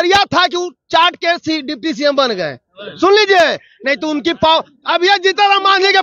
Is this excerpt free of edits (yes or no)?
yes